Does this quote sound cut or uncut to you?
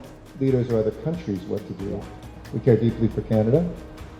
cut